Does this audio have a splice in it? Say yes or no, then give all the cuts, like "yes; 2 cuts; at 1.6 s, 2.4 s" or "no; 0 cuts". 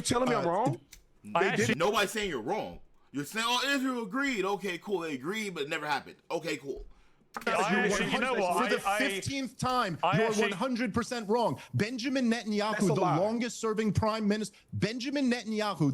no; 0 cuts